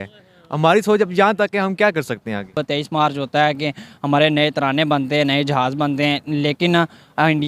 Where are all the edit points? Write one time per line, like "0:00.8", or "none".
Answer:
0:02.5